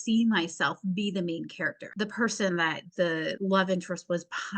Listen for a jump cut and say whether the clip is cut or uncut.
cut